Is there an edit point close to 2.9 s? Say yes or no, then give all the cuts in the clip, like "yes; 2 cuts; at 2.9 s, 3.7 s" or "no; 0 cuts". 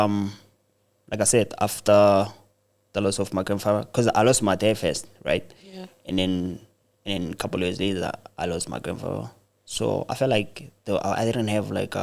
no; 0 cuts